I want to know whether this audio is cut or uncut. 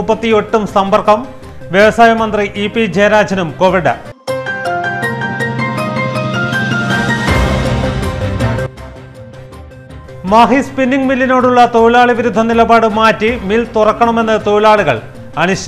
uncut